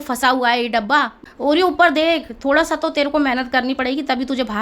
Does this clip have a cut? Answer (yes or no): yes